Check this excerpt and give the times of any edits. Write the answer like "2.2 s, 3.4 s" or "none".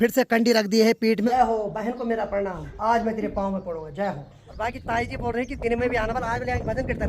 1.3 s, 2.7 s, 4.6 s